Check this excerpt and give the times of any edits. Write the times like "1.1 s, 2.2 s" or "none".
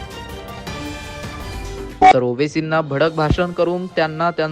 1.9 s